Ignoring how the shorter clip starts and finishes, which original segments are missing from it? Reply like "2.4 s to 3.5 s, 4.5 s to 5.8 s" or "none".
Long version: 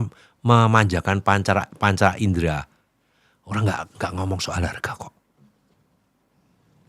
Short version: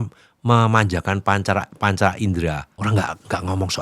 2.7 s to 3.4 s